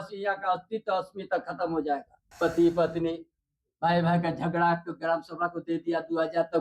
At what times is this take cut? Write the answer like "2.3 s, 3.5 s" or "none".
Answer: 2.2 s